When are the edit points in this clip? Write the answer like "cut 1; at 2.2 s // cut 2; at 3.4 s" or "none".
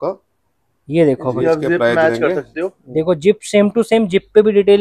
none